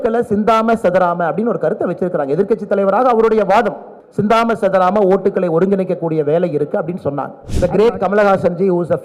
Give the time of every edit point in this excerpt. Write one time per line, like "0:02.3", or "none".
0:07.4